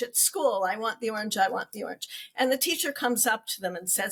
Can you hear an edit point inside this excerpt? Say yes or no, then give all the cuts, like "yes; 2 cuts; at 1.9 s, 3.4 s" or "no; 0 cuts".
no; 0 cuts